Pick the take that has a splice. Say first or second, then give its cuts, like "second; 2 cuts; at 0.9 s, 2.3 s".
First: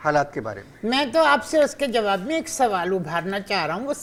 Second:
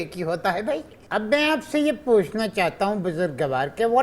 second; 1 cut; at 1.0 s